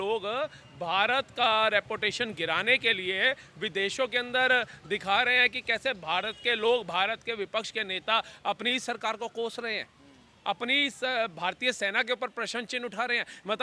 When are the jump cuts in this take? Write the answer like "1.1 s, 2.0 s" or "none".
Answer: none